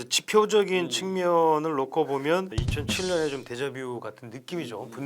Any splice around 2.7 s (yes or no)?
yes